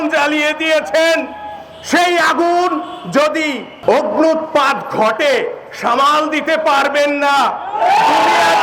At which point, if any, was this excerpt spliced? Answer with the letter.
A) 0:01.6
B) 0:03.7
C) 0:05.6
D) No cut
B